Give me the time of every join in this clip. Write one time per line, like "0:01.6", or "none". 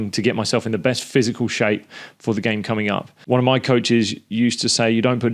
0:03.1